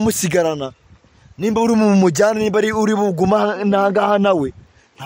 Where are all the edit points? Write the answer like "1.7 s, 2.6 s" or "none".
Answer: none